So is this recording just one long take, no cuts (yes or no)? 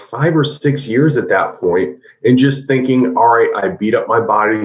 yes